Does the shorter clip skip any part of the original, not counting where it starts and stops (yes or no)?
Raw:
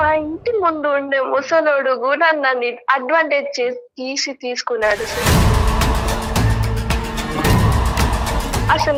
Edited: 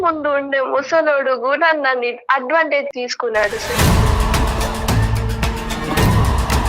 yes